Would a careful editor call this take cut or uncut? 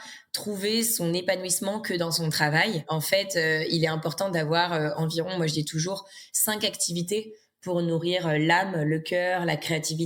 cut